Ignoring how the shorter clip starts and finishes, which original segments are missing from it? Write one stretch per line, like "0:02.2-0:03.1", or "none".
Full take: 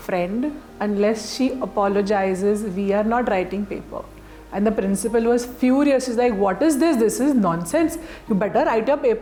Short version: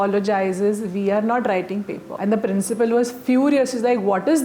0:03.8-0:04.4